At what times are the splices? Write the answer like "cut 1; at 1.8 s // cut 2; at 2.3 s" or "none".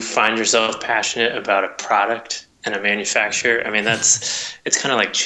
none